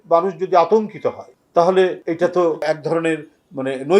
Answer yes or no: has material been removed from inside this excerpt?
yes